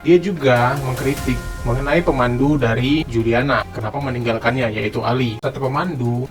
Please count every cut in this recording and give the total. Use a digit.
1